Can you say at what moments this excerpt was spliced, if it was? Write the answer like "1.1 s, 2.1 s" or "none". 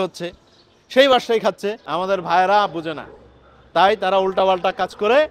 1.8 s